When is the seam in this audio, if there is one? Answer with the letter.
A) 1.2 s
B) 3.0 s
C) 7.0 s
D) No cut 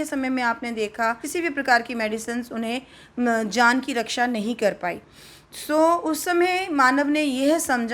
A